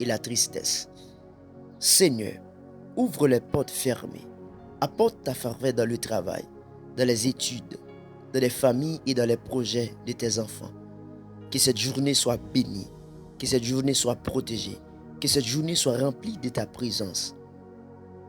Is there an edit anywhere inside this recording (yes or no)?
yes